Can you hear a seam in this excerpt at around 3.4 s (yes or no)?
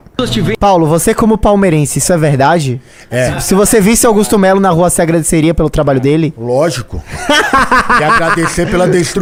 no